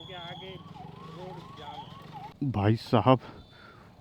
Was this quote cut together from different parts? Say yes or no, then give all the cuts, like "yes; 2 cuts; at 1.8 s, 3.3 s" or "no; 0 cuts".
yes; 1 cut; at 2.2 s